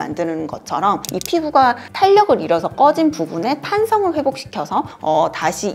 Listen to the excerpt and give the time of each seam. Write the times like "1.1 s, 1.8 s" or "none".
none

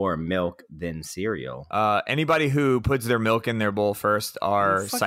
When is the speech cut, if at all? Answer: 1.0 s

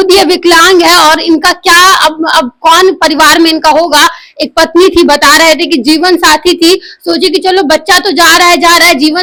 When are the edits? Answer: none

